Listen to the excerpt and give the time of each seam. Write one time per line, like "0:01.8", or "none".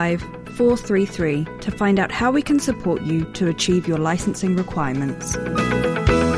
0:05.3